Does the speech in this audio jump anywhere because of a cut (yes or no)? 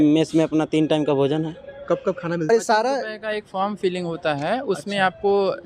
yes